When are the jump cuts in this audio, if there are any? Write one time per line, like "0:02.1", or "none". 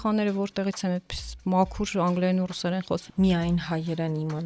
0:03.0